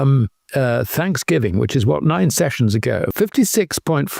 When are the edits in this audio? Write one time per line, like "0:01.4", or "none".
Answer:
0:03.1